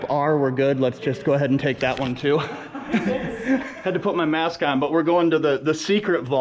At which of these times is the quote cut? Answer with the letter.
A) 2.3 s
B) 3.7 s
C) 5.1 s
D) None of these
B